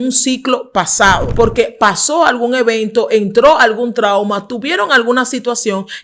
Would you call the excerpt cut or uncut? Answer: cut